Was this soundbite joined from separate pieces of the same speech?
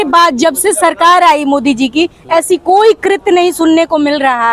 no; 0 cuts

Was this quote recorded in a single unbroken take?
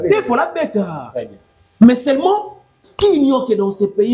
no; 1 cut; at 2.8 s

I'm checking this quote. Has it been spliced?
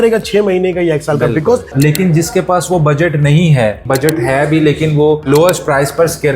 yes; 2 cuts; at 1.7 s, 3.8 s

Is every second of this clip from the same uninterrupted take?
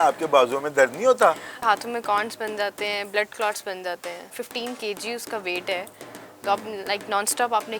no; 2 cuts; at 1.6 s, 4.3 s

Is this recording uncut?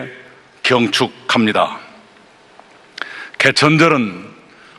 no; 1 cut; at 2.7 s

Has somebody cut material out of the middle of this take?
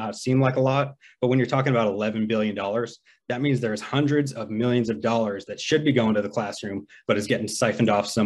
no; 0 cuts

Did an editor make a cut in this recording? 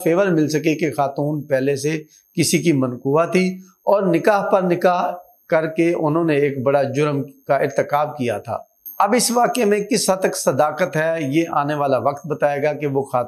no; 0 cuts

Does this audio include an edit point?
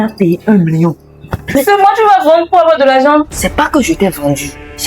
yes; 1 cut; at 1.4 s

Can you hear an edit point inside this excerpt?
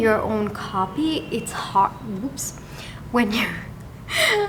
no; 0 cuts

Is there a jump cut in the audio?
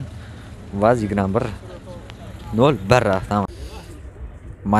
yes; 1 cut; at 3.5 s

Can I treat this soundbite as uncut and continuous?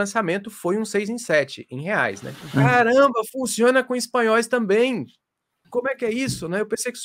no; 2 cuts; at 2.3 s, 5.6 s

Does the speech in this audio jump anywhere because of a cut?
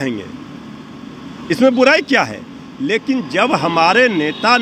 no; 0 cuts

